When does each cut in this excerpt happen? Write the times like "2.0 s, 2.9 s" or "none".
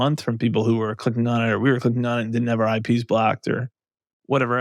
none